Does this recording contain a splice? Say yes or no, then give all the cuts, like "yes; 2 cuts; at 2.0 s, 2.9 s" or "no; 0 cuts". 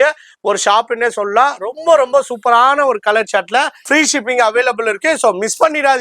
yes; 1 cut; at 3.8 s